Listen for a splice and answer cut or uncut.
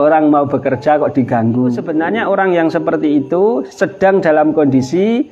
cut